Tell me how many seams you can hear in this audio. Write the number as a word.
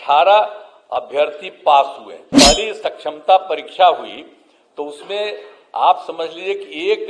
one